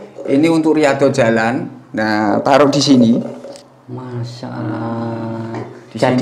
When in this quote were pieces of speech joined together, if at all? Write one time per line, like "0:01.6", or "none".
none